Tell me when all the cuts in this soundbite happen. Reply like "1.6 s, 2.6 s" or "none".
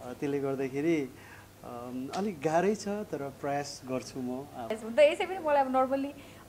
4.8 s